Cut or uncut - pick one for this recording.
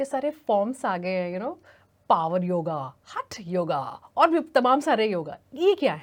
uncut